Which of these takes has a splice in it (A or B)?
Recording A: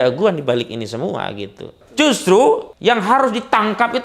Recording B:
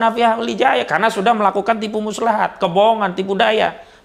A